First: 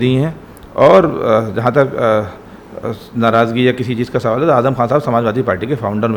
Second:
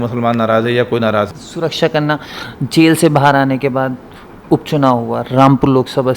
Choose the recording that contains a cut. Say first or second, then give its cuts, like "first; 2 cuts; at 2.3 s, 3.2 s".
second; 1 cut; at 1.4 s